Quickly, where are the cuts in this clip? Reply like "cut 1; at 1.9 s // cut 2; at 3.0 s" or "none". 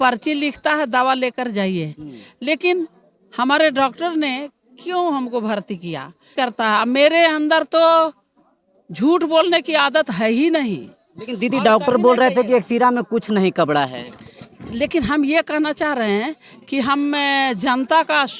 cut 1; at 6.3 s